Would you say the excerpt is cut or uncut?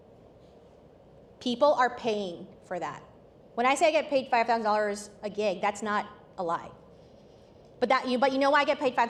uncut